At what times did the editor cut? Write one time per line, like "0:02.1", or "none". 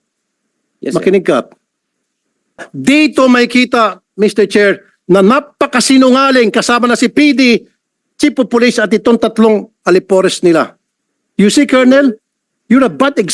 0:02.7

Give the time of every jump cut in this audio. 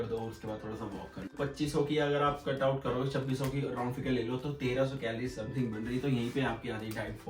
0:01.3

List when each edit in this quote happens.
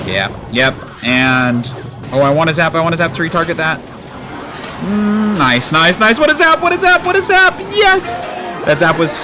none

